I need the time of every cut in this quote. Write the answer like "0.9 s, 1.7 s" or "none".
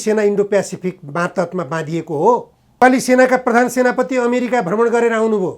2.8 s

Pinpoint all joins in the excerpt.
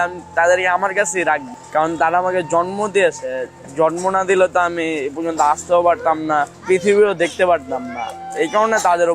1.5 s, 6.5 s

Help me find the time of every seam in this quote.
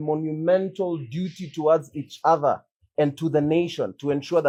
none

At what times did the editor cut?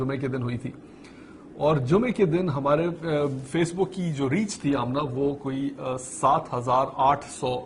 1.5 s

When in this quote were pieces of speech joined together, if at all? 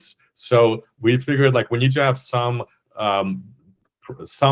none

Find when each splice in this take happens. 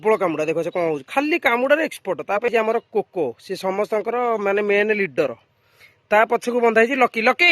2.5 s

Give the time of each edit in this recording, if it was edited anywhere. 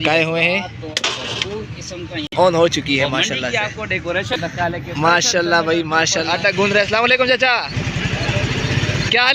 6.3 s

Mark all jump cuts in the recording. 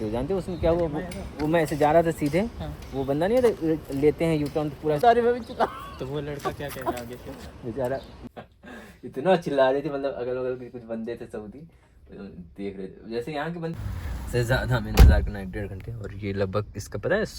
5.0 s, 8.1 s, 13.7 s

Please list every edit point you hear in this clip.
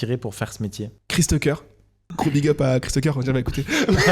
0.9 s, 2.0 s

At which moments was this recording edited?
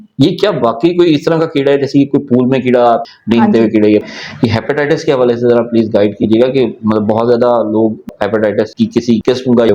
4.1 s, 8.0 s

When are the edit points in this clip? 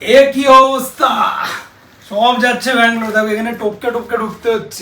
none

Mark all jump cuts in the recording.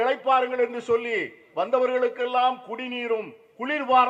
none

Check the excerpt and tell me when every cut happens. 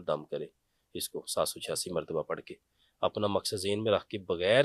none

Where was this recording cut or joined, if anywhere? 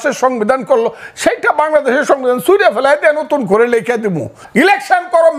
4.4 s

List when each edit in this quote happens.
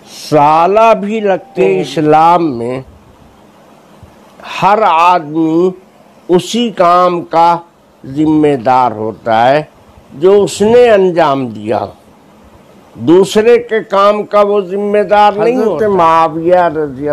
1.5 s, 15.7 s

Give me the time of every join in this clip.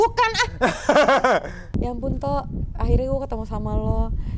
1.6 s

